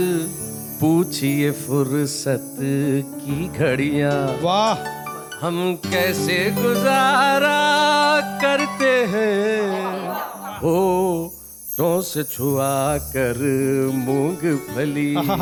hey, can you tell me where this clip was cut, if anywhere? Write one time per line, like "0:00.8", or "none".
none